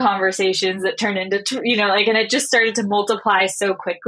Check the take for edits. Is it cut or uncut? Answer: uncut